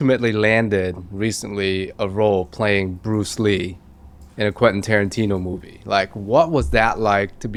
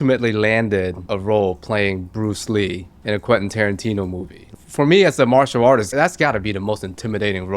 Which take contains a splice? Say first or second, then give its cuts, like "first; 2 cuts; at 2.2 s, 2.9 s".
second; 4 cuts; at 1.0 s, 2.9 s, 4.5 s, 5.9 s